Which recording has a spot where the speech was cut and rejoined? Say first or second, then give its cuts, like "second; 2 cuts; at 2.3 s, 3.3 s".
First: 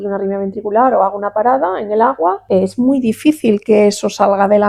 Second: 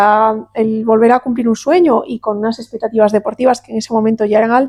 first; 1 cut; at 2.4 s